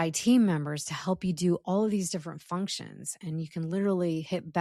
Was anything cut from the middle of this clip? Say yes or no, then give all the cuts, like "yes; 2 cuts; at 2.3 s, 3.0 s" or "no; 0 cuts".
no; 0 cuts